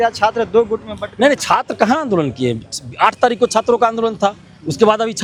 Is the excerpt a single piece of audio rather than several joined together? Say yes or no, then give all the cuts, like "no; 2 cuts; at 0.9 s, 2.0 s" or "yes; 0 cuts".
yes; 0 cuts